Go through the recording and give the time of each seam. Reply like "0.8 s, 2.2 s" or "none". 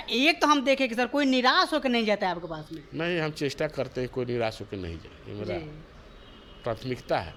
none